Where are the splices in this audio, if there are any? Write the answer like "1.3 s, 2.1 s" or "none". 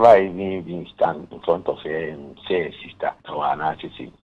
3.2 s

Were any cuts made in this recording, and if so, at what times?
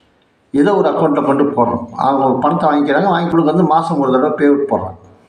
3.3 s

